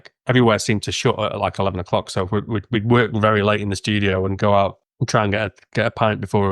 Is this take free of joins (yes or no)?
no